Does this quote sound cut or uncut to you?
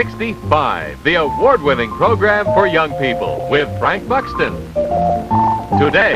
uncut